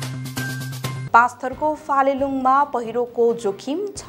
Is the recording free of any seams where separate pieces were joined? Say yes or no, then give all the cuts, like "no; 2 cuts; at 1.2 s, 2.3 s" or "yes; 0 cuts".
no; 1 cut; at 1.0 s